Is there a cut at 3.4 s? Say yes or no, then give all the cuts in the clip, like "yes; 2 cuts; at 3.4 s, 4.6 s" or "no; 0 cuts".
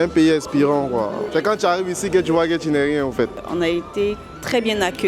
yes; 2 cuts; at 1.3 s, 3.4 s